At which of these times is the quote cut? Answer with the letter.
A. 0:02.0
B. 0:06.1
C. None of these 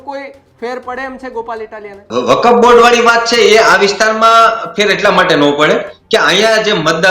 A